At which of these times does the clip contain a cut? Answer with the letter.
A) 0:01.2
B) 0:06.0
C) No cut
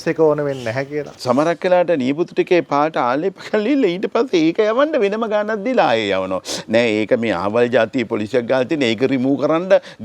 A